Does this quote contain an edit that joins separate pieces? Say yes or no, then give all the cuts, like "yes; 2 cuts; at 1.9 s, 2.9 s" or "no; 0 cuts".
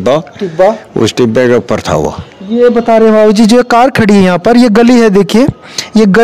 no; 0 cuts